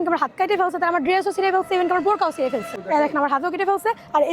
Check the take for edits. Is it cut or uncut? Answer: cut